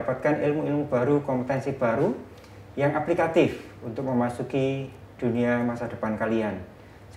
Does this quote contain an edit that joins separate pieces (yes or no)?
no